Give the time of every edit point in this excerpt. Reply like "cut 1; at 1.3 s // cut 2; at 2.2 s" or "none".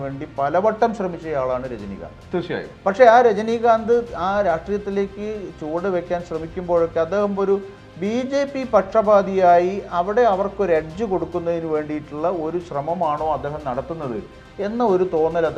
none